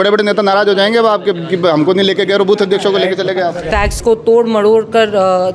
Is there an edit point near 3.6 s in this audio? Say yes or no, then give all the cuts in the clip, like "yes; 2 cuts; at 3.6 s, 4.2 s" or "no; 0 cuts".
yes; 1 cut; at 3.6 s